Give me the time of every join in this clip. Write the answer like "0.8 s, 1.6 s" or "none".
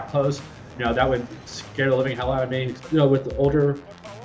2.8 s

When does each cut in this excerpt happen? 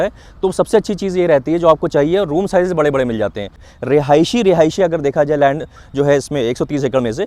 3.7 s

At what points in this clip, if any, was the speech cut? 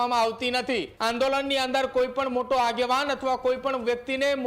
0.9 s

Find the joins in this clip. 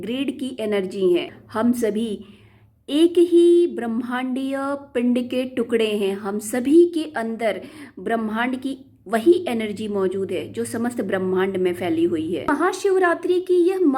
1.4 s, 12.5 s

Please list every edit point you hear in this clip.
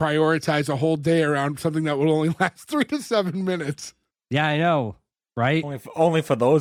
none

